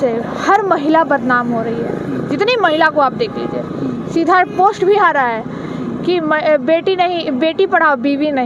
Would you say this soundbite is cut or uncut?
uncut